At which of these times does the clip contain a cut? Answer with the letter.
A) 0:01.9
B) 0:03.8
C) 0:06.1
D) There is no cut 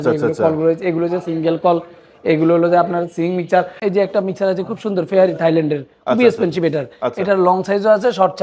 B